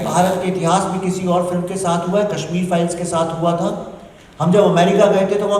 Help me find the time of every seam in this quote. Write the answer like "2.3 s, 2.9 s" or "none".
none